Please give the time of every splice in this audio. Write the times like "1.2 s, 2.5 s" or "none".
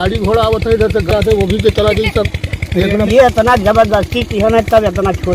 3.1 s